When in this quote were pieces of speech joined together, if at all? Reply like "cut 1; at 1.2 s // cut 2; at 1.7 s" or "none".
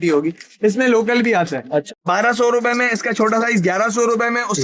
cut 1; at 1.9 s